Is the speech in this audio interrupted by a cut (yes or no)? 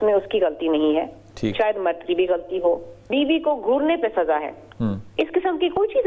yes